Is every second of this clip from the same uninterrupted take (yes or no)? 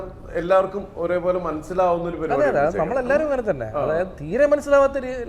yes